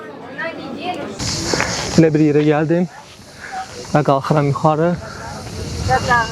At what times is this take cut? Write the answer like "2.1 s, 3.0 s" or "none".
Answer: 1.2 s